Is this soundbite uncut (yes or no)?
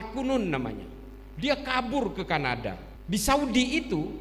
no